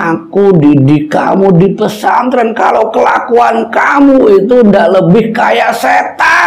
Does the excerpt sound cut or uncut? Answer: uncut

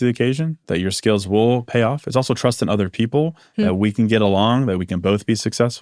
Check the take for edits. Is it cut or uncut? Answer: uncut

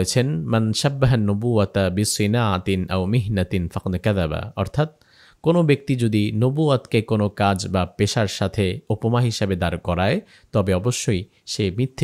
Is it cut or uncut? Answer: uncut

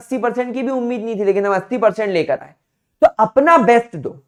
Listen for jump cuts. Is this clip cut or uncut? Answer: uncut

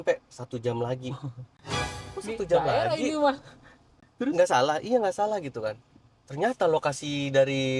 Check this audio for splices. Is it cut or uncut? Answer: uncut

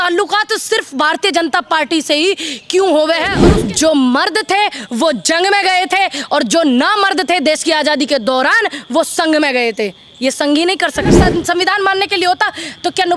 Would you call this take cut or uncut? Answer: cut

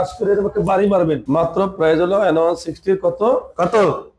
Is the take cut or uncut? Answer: cut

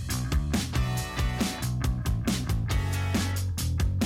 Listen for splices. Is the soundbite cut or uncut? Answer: cut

